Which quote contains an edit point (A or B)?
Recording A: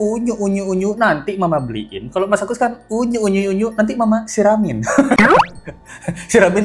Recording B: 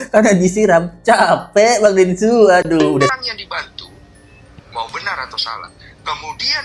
B